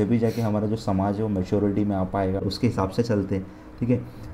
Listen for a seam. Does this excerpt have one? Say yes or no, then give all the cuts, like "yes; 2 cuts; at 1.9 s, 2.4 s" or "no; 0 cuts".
yes; 1 cut; at 2.5 s